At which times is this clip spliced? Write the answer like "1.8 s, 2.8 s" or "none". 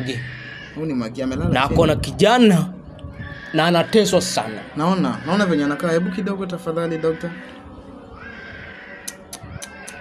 none